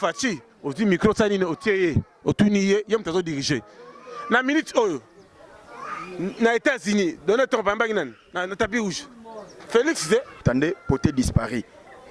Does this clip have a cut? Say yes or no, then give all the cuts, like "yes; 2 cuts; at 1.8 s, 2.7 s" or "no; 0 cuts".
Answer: yes; 1 cut; at 10.4 s